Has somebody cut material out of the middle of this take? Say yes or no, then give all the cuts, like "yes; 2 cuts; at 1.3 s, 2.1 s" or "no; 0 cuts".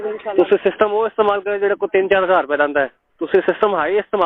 yes; 1 cut; at 2.9 s